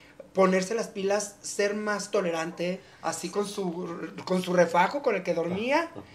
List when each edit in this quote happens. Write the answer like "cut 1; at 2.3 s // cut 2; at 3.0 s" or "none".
cut 1; at 2.9 s

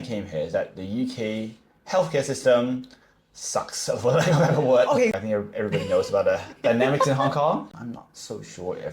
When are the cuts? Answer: cut 1; at 5.2 s // cut 2; at 7.6 s

